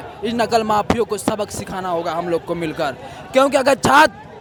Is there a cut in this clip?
no; 0 cuts

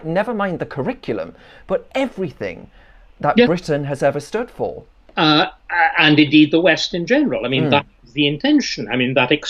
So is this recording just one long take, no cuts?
yes; 0 cuts

